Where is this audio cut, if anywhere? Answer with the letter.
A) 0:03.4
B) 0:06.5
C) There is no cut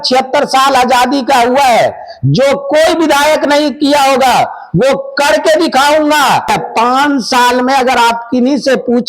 B